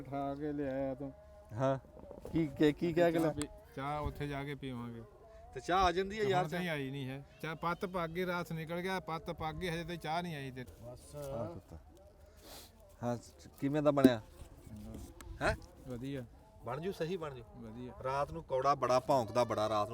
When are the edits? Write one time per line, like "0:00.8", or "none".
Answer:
0:10.7